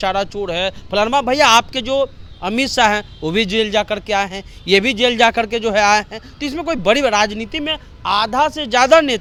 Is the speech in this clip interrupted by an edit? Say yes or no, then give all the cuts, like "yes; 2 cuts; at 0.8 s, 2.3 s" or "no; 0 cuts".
no; 0 cuts